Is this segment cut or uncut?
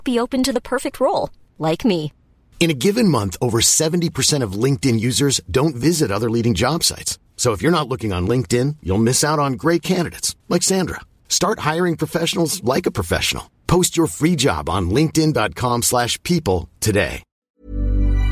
cut